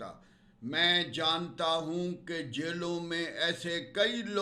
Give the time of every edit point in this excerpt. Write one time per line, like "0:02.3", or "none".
none